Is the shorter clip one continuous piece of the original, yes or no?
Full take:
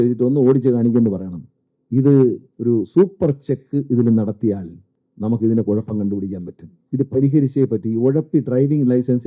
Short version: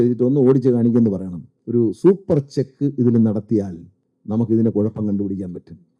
no